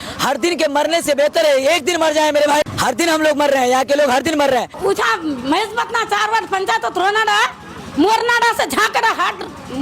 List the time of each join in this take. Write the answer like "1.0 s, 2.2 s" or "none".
2.7 s, 4.7 s